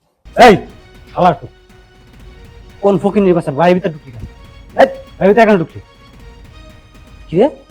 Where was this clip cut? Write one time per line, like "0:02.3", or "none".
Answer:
none